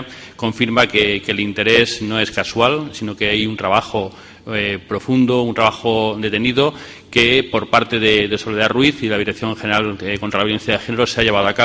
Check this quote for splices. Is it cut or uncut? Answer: uncut